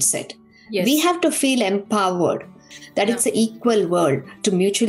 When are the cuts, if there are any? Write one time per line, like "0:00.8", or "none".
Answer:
0:02.7